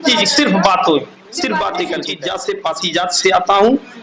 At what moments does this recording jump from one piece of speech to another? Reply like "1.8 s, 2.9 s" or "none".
2.1 s